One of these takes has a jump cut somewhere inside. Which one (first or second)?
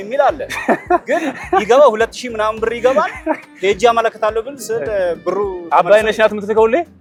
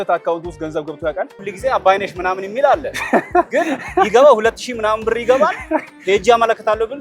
second